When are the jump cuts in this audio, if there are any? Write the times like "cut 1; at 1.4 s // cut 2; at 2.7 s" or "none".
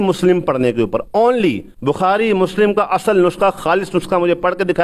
cut 1; at 1.7 s